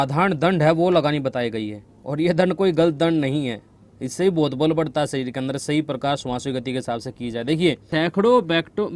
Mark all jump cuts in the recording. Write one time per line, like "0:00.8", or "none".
0:07.9